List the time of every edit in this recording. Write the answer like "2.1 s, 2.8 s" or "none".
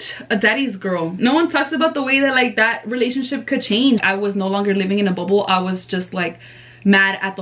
1.2 s, 4.0 s